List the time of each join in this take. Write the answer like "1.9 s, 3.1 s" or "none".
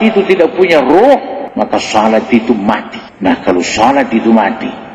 1.4 s